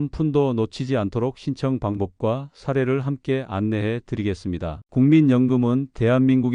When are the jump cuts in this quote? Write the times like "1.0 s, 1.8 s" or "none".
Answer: none